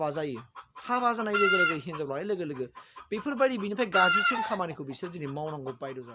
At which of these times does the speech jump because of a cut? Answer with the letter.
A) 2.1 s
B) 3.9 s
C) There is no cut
C